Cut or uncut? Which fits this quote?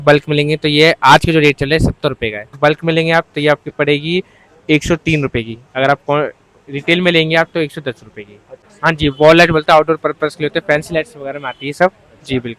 cut